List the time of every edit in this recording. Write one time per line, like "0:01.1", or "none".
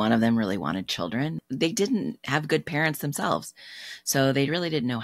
0:01.4